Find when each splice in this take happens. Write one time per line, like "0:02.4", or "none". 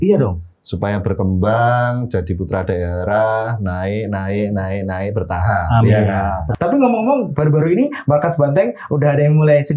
0:06.5